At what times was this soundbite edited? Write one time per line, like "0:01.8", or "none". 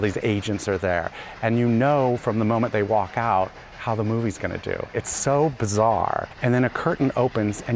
0:06.3

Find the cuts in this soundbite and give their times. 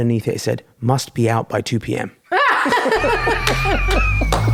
none

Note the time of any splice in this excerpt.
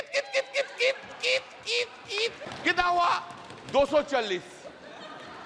0:02.4

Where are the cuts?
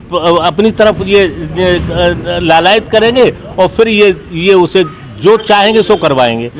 none

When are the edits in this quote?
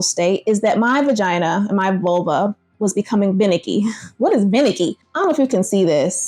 0:05.0

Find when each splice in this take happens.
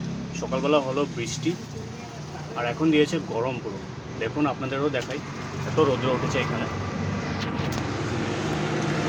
none

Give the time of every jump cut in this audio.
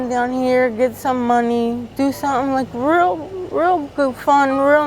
none

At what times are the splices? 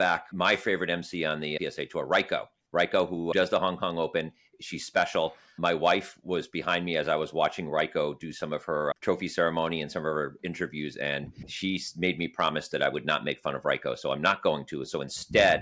0:01.6
0:03.0
0:11.4

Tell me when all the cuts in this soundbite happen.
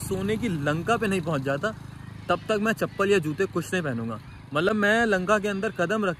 none

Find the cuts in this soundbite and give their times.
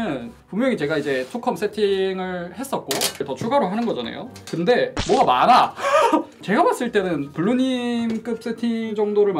0:03.2
0:05.0
0:06.4

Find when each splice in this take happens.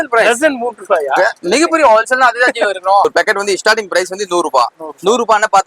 0:03.1

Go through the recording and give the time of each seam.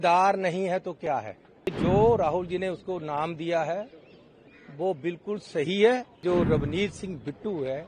0:01.7
0:06.2

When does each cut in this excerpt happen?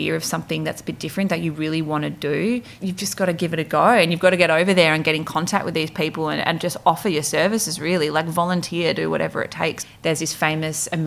0:02.7
0:09.8

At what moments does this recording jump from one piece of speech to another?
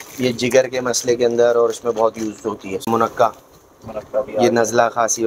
0:02.9

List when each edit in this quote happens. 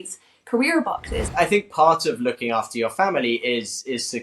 0:01.3

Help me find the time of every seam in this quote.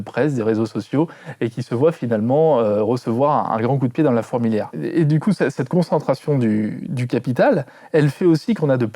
0:04.7

